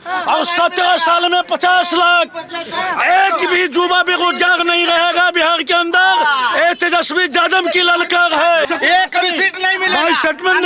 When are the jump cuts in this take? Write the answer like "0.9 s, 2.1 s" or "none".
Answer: 8.7 s

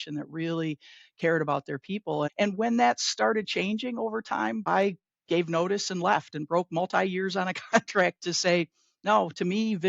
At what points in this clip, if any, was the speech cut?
2.3 s, 4.6 s

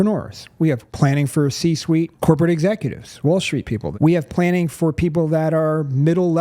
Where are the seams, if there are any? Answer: 0.9 s, 2.1 s, 3.9 s

